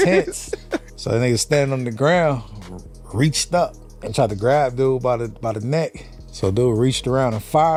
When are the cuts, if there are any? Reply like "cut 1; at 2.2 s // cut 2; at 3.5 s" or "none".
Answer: none